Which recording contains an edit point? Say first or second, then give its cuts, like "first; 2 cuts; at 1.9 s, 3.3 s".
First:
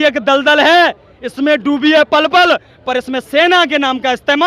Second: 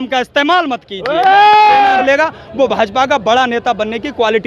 second; 1 cut; at 2.0 s